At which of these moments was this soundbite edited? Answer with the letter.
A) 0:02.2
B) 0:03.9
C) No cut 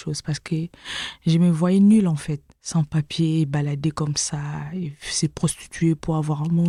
C